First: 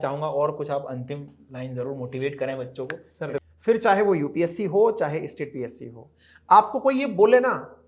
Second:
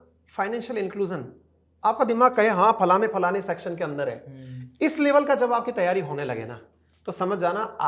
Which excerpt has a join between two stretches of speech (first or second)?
first